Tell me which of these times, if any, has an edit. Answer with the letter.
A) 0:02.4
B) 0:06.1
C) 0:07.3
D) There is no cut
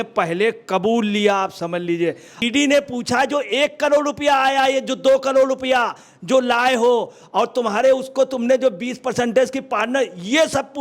A